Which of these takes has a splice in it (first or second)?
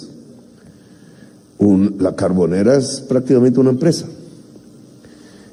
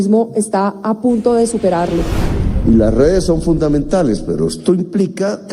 second